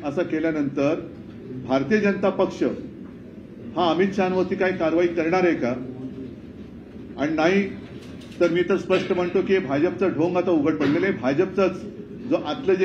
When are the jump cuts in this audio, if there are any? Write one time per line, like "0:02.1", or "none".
none

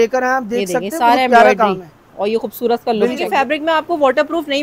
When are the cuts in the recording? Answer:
0:03.2

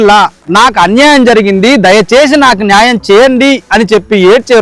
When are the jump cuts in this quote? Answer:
none

